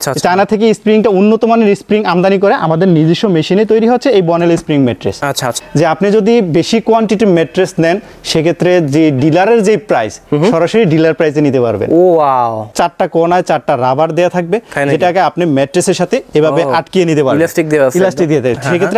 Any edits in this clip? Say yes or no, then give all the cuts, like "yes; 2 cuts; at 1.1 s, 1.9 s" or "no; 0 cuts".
yes; 2 cuts; at 5.6 s, 12.7 s